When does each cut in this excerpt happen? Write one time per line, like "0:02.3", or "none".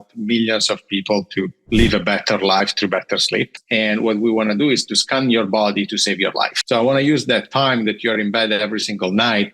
0:03.6
0:06.6